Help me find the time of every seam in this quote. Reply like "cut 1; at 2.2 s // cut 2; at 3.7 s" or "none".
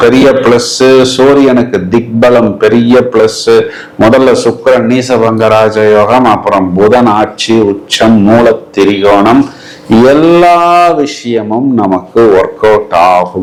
none